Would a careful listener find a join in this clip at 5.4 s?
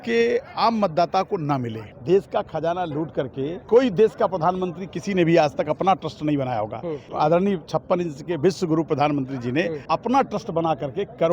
no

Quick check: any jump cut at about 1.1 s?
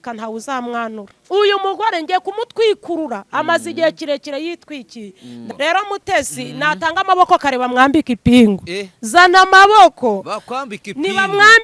yes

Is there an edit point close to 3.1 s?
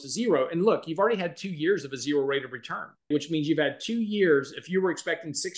yes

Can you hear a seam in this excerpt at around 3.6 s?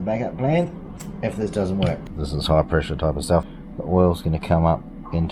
yes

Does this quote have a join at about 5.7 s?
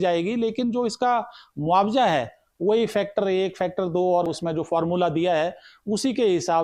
no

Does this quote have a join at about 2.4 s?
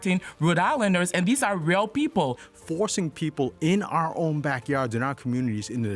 yes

